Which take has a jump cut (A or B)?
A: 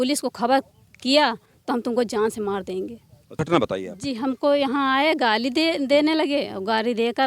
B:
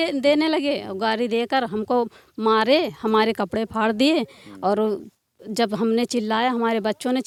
A